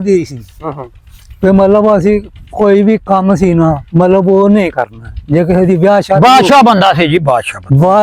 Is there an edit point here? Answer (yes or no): no